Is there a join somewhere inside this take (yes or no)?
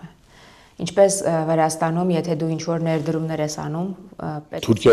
no